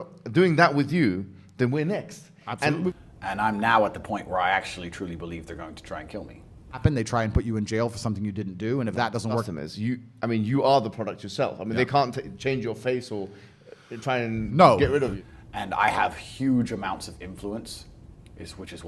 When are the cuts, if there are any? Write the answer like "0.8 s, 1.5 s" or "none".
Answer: 2.9 s, 6.8 s, 9.5 s, 15.2 s